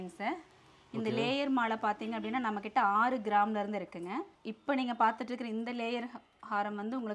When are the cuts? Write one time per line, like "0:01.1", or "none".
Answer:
none

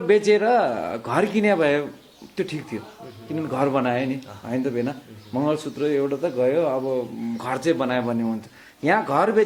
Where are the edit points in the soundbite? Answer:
none

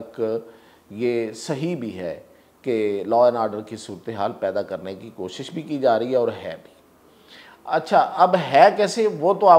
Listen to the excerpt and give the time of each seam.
none

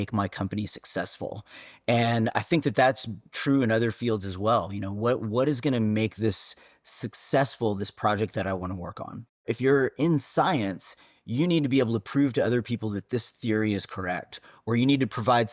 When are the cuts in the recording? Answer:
0:09.4

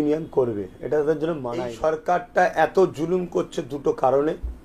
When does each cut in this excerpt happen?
0:01.7

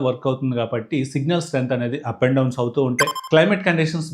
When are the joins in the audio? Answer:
0:03.2

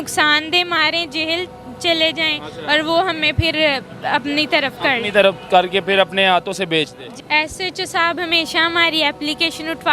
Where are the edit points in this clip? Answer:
0:07.1

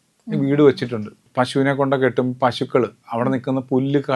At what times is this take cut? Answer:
0:01.2

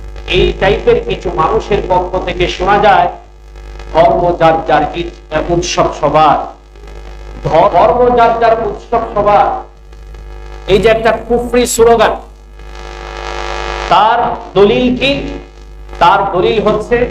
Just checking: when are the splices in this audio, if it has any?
0:07.7

